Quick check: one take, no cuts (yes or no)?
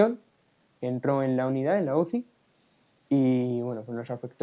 yes